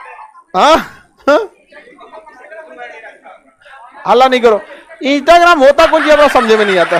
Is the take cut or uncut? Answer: uncut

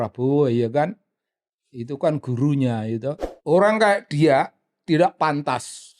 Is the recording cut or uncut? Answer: cut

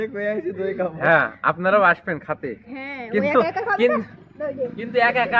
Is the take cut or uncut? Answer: uncut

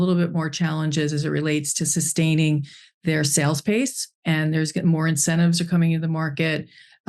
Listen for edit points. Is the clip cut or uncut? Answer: uncut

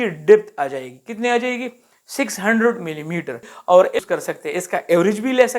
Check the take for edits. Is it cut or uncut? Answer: cut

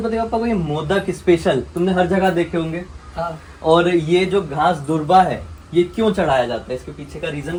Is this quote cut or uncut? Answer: uncut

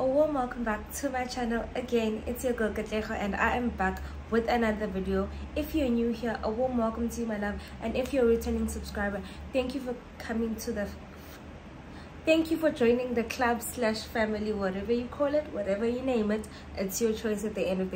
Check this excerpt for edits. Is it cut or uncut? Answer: uncut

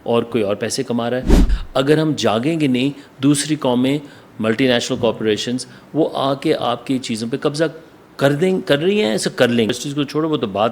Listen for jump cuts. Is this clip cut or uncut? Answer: cut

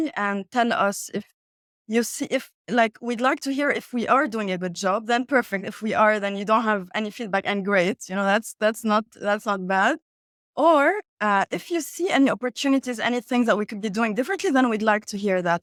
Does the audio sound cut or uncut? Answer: uncut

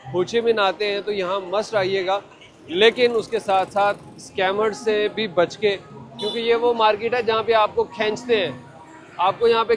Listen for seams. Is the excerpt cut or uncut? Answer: uncut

